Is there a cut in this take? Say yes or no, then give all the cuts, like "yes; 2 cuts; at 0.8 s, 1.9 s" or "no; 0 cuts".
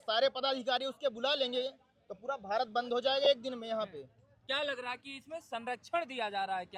no; 0 cuts